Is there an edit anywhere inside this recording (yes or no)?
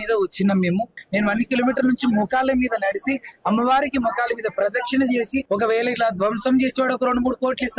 yes